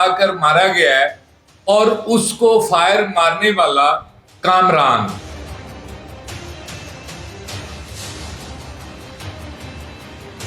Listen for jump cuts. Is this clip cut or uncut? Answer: cut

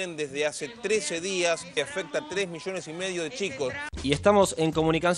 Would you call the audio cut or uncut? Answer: cut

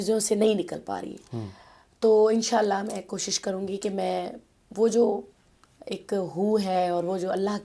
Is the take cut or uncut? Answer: uncut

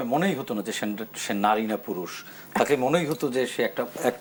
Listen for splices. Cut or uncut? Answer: uncut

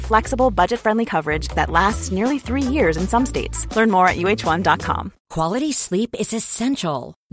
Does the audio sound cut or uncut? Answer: cut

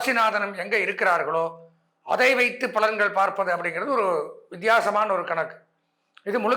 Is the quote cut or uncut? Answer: uncut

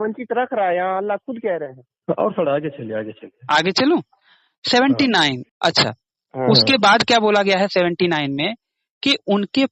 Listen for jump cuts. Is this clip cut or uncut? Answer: cut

